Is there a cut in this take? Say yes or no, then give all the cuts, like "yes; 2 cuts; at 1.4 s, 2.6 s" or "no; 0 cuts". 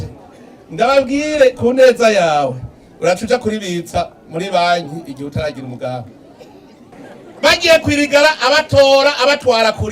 yes; 1 cut; at 6.9 s